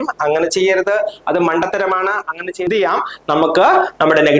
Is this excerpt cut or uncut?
cut